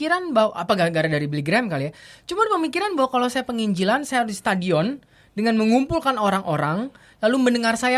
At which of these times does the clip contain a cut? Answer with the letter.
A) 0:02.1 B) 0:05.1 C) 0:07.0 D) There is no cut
D